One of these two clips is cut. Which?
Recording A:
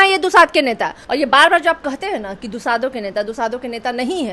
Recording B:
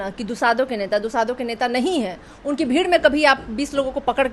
A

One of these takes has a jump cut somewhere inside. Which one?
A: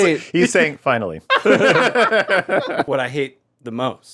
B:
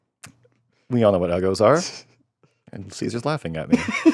A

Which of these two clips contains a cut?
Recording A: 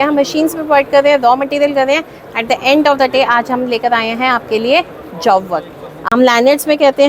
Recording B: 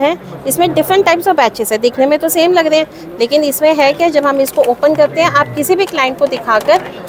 A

